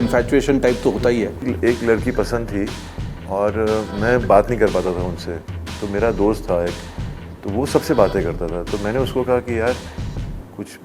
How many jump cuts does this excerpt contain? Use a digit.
1